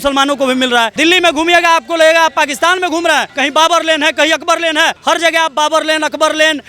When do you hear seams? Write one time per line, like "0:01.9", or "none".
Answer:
0:00.9
0:03.3
0:05.0